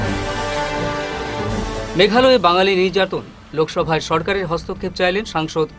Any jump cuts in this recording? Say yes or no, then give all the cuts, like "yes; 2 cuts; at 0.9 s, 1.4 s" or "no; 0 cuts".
yes; 1 cut; at 1.8 s